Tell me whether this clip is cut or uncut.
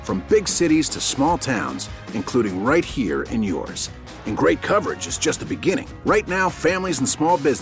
uncut